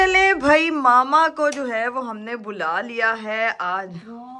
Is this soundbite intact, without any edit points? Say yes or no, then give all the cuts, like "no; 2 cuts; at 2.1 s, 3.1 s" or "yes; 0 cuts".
yes; 0 cuts